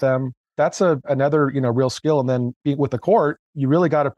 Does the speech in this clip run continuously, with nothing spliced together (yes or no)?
no